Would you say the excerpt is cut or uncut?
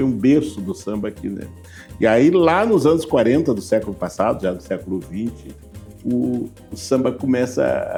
uncut